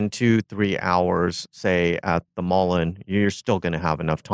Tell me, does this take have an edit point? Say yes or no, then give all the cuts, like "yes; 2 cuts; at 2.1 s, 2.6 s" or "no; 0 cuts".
no; 0 cuts